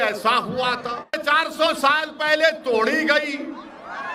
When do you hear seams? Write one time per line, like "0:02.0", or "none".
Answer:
0:01.2